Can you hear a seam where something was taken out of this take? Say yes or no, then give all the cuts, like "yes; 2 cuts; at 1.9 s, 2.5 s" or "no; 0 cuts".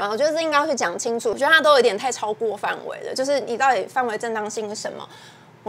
yes; 1 cut; at 1.4 s